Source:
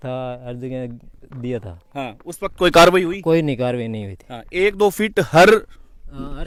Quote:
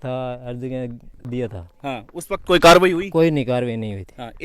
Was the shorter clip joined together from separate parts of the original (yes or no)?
yes